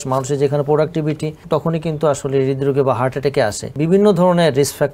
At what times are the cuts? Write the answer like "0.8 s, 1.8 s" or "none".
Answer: 1.3 s, 3.7 s